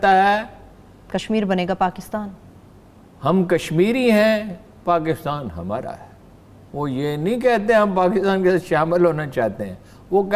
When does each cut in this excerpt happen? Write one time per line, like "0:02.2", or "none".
none